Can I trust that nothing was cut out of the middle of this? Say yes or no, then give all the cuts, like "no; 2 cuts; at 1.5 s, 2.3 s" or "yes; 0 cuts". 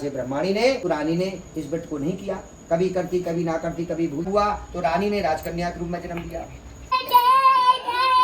no; 3 cuts; at 0.8 s, 4.3 s, 6.8 s